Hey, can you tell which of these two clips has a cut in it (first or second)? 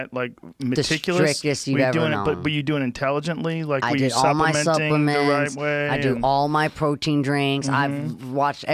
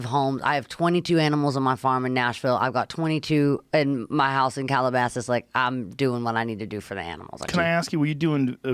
second